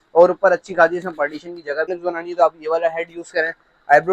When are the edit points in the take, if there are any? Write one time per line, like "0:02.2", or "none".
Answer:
0:01.9